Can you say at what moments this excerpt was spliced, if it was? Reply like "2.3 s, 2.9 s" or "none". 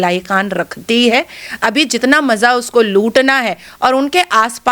none